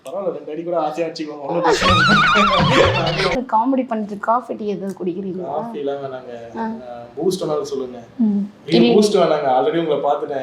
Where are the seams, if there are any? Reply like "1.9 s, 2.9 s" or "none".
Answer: 3.4 s